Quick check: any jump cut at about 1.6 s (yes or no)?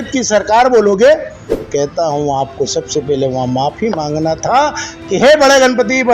yes